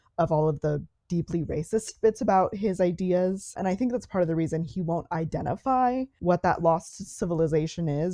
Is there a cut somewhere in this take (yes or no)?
yes